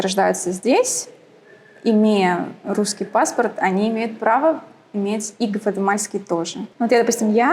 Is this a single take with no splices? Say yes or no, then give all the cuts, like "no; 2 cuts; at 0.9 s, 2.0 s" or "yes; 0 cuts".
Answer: no; 1 cut; at 6.6 s